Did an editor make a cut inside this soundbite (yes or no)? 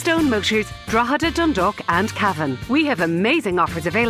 no